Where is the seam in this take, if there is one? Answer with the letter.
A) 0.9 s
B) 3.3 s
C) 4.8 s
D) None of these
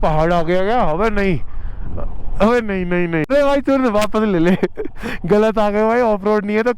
B